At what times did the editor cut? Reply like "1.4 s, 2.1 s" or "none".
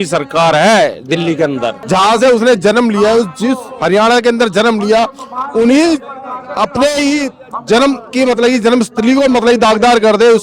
1.7 s